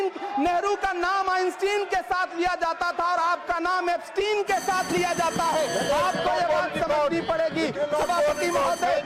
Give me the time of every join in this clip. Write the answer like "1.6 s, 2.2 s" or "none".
none